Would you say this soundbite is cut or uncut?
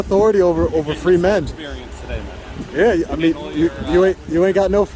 uncut